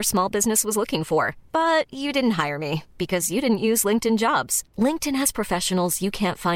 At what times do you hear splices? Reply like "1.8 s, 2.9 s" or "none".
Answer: none